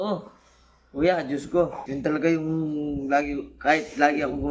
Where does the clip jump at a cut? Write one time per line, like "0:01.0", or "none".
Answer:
0:01.8